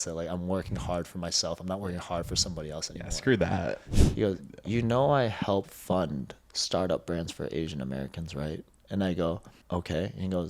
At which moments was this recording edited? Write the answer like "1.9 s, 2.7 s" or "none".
3.8 s, 9.5 s

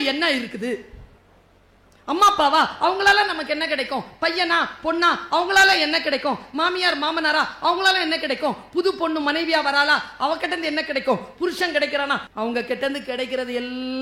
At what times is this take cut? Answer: 12.3 s

